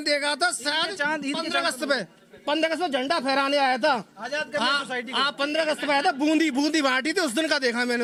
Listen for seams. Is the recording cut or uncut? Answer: uncut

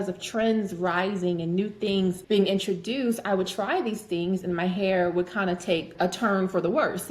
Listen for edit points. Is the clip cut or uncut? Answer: cut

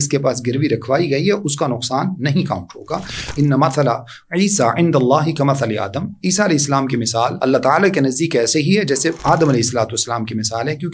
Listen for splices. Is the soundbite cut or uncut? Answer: cut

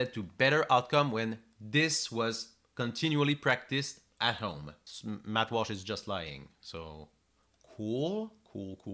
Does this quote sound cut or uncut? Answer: cut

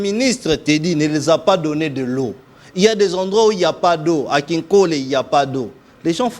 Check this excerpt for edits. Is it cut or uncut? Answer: uncut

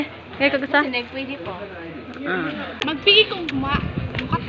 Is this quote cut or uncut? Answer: cut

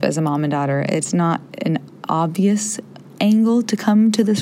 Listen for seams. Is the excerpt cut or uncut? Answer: uncut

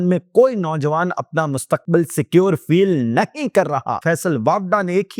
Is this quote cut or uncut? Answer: cut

